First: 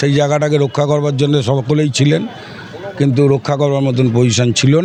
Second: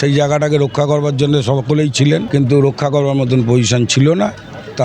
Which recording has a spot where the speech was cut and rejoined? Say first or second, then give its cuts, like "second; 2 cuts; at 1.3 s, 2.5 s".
second; 1 cut; at 2.3 s